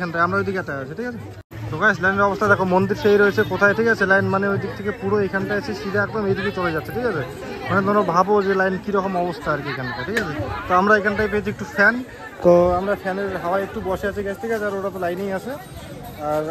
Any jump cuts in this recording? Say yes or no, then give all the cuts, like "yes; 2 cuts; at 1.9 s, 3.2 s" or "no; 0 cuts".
no; 0 cuts